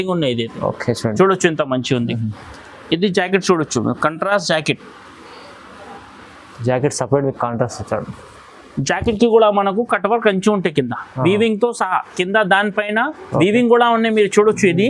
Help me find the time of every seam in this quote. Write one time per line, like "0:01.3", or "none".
none